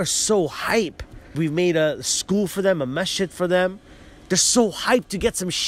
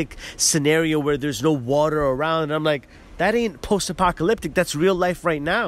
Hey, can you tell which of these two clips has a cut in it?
first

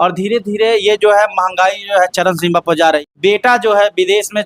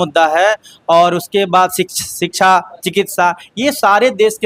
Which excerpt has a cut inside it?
first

